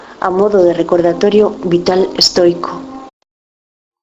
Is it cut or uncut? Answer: uncut